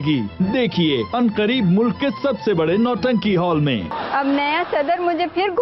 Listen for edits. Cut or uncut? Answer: cut